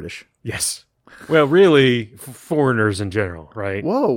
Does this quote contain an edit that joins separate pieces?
no; 0 cuts

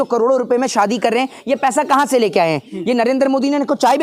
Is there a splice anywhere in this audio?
no; 0 cuts

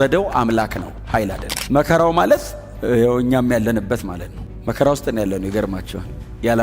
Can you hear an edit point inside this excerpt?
yes; 1 cut; at 1.5 s

